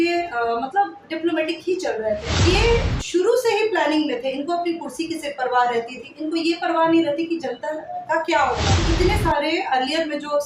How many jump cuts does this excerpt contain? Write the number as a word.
two